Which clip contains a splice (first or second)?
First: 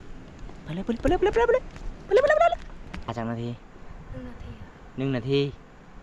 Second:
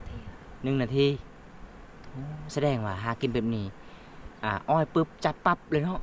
first